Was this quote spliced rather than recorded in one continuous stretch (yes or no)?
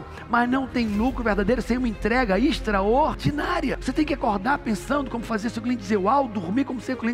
no